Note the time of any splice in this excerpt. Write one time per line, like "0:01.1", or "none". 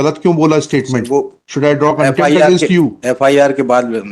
none